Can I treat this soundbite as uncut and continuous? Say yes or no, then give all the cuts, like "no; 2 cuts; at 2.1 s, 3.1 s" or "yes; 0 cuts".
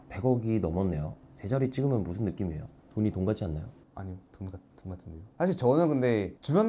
no; 1 cut; at 5.3 s